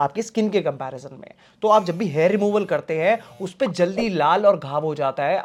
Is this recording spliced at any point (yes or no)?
no